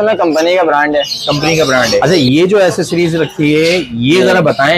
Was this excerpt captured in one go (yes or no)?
no